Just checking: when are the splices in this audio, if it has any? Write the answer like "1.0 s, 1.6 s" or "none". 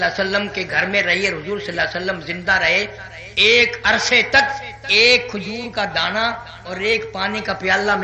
none